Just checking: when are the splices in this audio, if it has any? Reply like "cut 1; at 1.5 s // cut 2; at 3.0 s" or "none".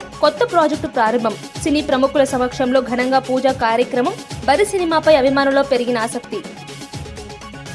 none

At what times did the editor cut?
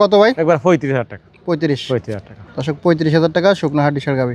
none

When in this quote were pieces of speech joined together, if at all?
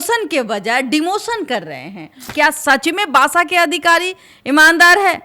cut 1; at 2.3 s

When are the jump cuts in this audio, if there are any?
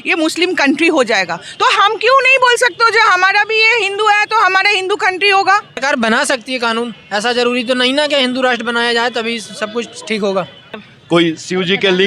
cut 1; at 5.7 s // cut 2; at 10.6 s

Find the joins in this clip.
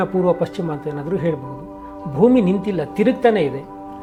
none

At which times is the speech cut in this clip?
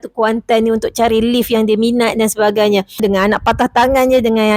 cut 1; at 3.0 s

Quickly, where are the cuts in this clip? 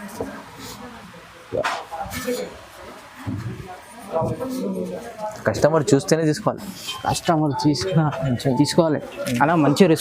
cut 1; at 5.1 s

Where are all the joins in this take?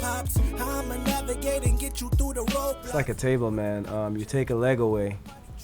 cut 1; at 2.8 s

